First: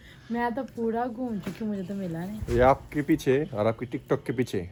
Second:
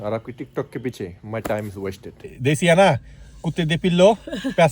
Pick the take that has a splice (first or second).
second